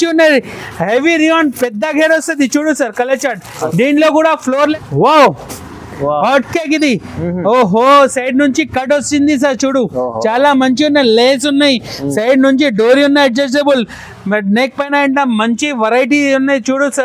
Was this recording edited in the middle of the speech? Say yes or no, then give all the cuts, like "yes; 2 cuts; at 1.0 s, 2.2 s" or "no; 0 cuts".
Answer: yes; 1 cut; at 4.7 s